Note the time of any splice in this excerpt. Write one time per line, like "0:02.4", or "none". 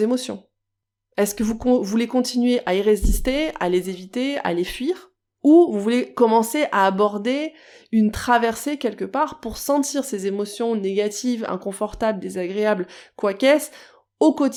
none